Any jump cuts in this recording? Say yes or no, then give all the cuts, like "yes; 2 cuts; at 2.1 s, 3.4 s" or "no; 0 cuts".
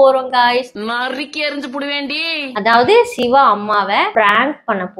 yes; 1 cut; at 4.1 s